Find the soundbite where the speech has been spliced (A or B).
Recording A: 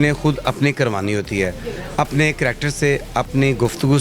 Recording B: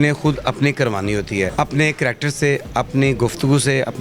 B